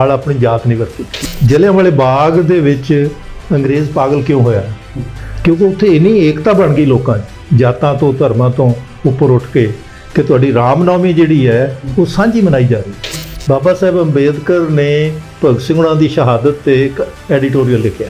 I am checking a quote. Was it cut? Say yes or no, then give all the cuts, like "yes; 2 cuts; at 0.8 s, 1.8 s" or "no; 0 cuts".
yes; 2 cuts; at 1.2 s, 13.3 s